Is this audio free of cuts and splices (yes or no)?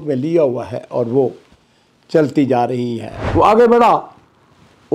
no